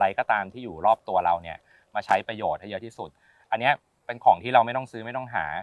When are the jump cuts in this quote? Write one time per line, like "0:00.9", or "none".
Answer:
none